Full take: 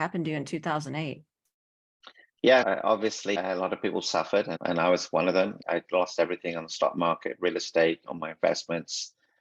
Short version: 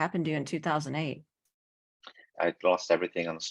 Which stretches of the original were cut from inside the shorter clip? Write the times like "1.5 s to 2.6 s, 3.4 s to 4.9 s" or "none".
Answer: 2.3 s to 5.6 s